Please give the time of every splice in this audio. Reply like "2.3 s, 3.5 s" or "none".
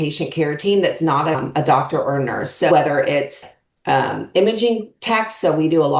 1.4 s